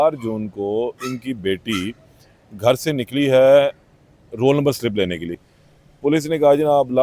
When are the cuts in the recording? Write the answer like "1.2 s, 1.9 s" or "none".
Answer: 5.4 s

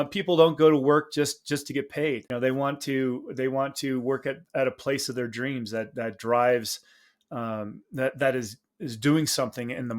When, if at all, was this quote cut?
2.3 s

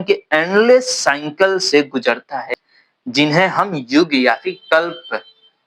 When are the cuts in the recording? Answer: none

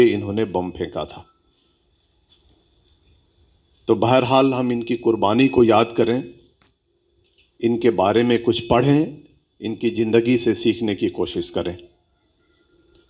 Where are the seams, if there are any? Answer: none

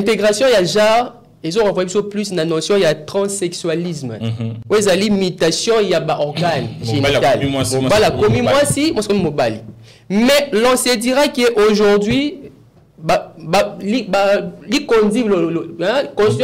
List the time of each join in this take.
none

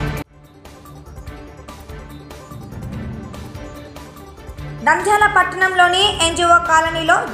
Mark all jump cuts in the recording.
3.6 s

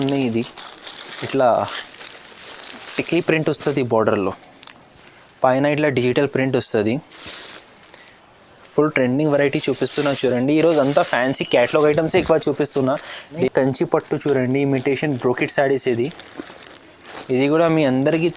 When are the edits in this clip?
13.5 s

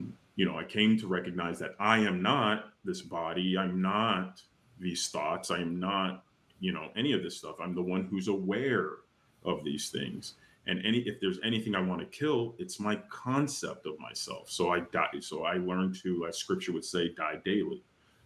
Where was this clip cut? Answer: none

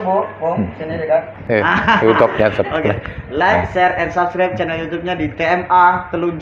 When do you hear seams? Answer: 1.4 s

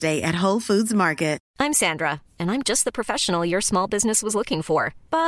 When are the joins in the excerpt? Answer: 1.4 s

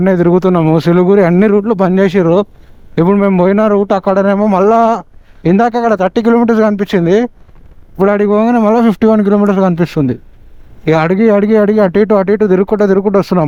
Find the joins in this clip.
none

